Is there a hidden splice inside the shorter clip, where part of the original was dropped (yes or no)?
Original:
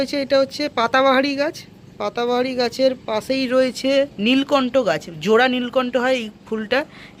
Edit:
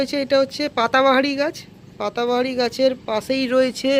no